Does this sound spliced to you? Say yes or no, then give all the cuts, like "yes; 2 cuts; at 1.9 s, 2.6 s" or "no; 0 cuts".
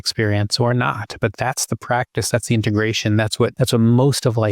yes; 1 cut; at 3.5 s